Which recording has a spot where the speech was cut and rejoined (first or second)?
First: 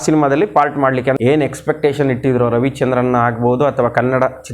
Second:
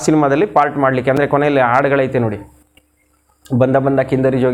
first